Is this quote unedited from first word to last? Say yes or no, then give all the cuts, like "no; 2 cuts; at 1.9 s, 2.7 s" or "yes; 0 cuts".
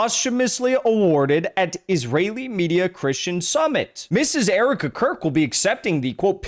no; 1 cut; at 4.0 s